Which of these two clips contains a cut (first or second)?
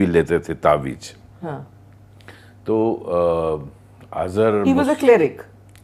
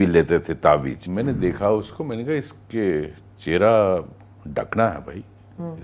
second